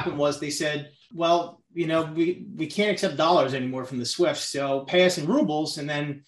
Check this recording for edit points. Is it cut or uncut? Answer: cut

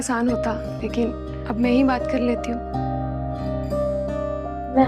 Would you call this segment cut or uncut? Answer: uncut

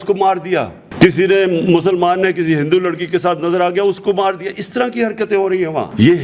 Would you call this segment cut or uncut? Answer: uncut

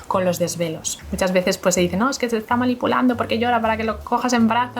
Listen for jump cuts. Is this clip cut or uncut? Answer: cut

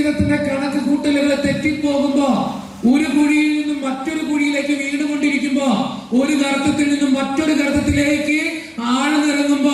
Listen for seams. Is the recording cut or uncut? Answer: uncut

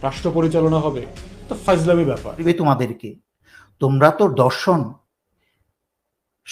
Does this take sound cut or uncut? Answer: cut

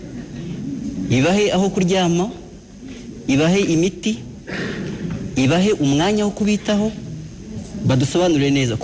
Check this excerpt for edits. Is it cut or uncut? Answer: uncut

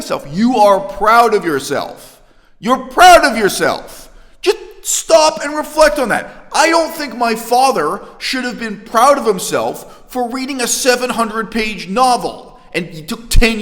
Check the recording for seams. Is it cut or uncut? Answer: uncut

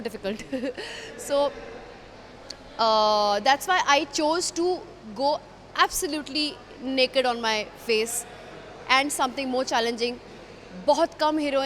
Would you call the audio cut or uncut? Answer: uncut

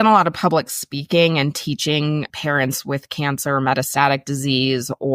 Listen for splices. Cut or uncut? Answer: cut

